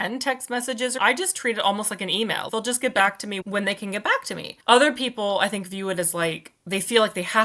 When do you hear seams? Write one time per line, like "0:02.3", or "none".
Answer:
0:00.9
0:02.5
0:03.4
0:04.5